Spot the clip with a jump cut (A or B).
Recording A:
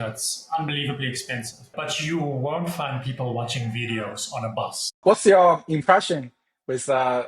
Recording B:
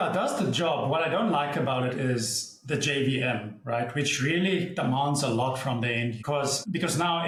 A